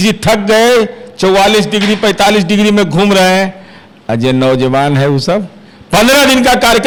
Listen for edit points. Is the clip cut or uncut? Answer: uncut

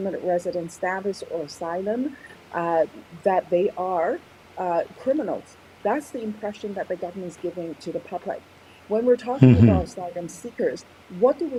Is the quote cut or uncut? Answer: uncut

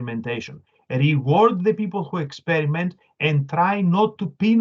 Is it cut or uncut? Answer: uncut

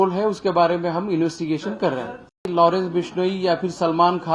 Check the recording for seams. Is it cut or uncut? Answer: cut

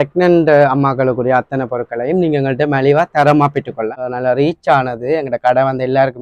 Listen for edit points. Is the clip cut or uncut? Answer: cut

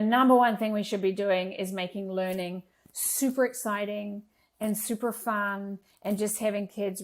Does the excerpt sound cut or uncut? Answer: uncut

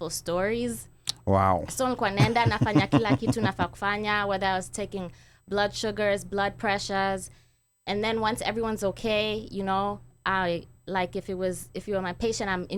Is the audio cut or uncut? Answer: uncut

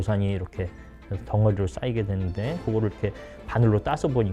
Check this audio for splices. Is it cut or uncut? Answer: uncut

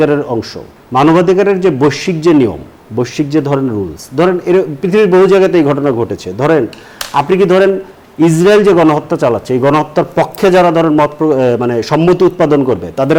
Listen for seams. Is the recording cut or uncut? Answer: uncut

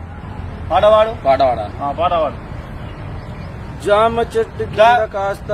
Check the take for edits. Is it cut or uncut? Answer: uncut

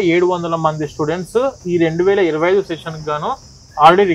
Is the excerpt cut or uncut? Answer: uncut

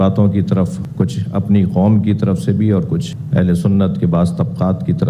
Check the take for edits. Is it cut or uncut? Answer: uncut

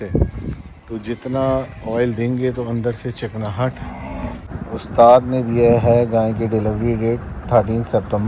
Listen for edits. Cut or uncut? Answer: cut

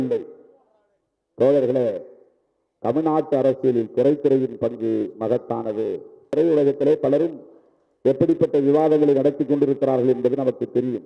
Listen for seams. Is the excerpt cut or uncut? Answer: cut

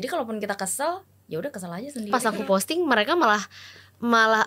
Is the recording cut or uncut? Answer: cut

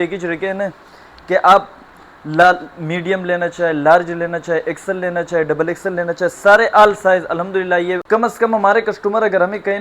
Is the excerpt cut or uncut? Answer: cut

